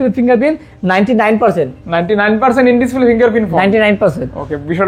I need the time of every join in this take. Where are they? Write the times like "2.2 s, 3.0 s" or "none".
none